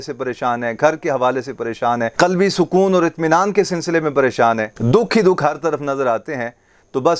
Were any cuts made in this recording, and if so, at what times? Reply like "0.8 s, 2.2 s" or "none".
none